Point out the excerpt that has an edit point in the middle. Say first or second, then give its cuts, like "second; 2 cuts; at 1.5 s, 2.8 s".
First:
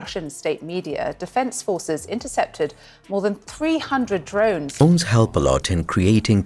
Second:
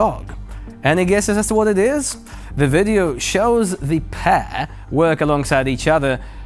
first; 1 cut; at 4.7 s